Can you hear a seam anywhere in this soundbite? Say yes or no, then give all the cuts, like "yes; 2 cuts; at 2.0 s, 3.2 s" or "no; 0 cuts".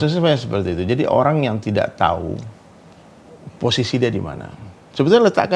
no; 0 cuts